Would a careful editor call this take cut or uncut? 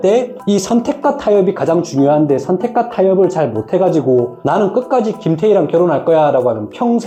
uncut